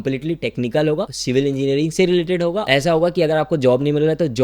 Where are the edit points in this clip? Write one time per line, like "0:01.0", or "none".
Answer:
0:01.2
0:02.6